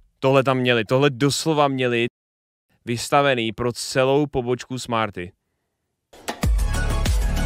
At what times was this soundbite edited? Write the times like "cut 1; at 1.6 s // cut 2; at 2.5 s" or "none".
cut 1; at 6.1 s